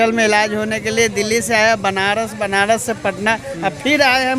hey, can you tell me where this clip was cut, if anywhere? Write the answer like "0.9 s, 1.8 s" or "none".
none